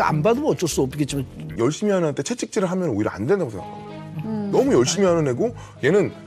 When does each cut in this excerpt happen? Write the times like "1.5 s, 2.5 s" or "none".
1.5 s